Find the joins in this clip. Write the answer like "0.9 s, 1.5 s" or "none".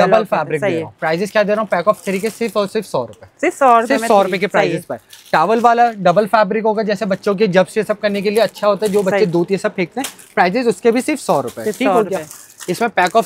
none